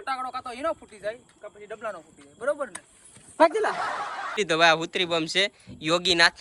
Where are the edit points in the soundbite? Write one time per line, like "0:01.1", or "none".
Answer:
0:04.3

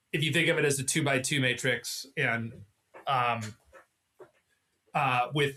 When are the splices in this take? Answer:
none

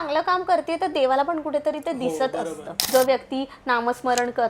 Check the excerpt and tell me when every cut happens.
0:02.7

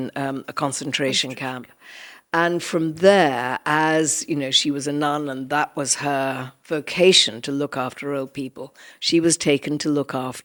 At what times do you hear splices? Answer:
none

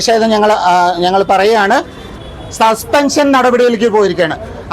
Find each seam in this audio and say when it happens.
0:02.2

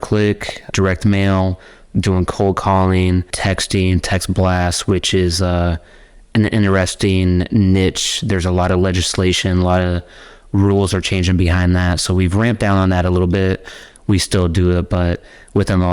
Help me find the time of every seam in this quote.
0:00.7
0:03.3

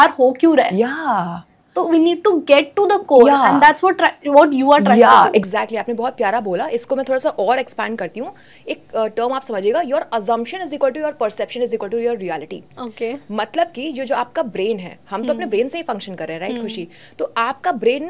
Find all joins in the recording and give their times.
none

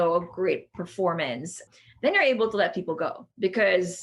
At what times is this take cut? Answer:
0:01.6

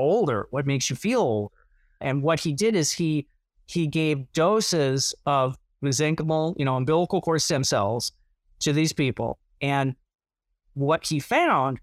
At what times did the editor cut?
0:02.0

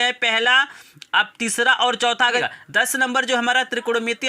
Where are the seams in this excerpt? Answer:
0:02.4

